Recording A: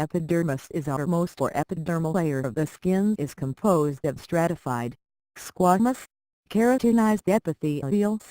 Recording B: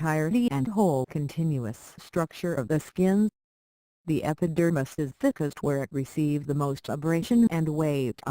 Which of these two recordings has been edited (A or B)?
A